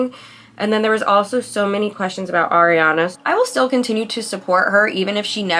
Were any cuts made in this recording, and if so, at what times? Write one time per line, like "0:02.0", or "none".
0:03.1